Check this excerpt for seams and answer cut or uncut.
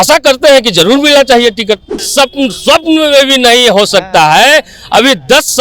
cut